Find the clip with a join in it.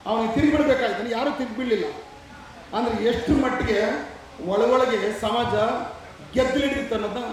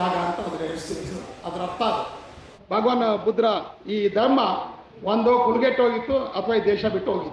second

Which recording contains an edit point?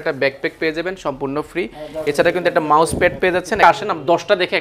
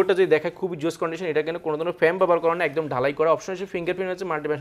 first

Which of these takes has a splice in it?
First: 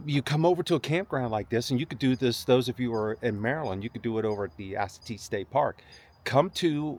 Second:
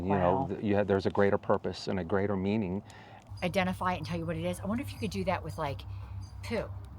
second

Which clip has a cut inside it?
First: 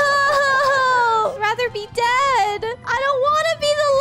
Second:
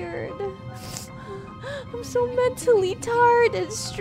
first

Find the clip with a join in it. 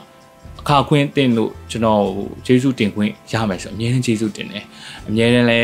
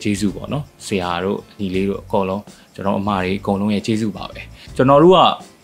second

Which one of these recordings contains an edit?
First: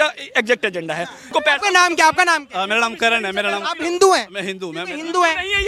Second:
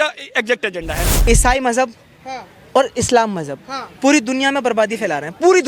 second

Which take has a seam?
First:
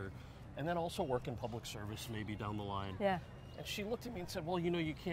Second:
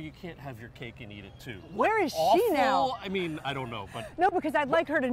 second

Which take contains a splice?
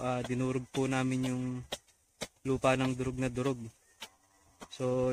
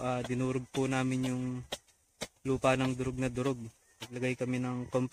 second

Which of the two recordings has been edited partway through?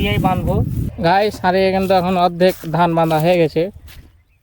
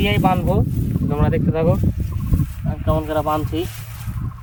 first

